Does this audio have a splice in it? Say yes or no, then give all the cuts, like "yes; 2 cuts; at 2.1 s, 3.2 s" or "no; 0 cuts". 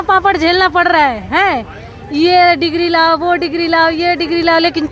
no; 0 cuts